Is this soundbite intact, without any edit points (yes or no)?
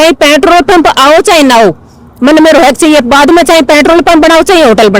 yes